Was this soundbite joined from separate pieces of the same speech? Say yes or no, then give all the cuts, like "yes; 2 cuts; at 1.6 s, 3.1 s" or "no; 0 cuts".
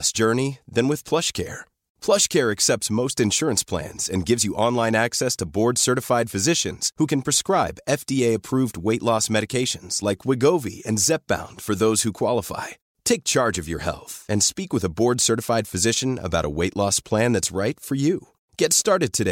no; 0 cuts